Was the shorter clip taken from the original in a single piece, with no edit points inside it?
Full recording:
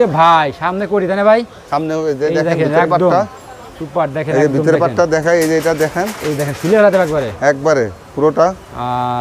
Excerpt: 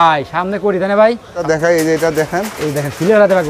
no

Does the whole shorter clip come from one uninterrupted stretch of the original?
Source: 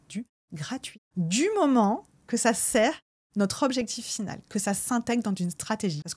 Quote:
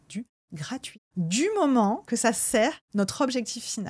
no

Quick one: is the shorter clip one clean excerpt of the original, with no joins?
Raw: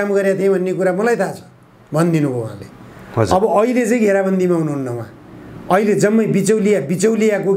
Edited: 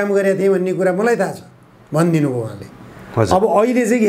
yes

